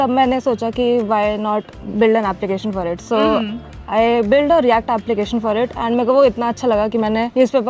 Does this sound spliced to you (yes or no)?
no